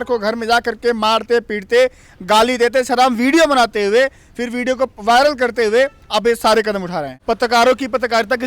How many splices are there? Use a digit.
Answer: 1